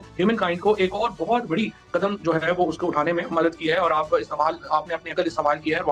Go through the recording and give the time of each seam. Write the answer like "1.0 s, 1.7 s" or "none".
none